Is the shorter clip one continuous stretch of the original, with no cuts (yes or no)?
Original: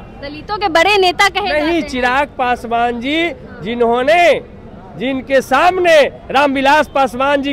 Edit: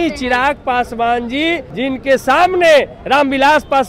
no